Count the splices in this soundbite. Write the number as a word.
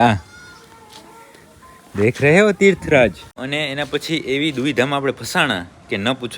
one